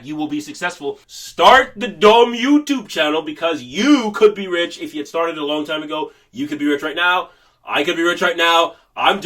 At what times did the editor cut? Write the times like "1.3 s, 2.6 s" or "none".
1.1 s